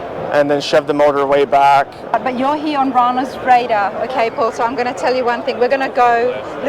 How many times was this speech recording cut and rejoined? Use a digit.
1